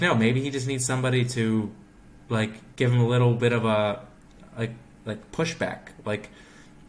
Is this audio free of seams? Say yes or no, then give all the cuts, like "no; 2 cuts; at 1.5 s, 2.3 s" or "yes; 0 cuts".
yes; 0 cuts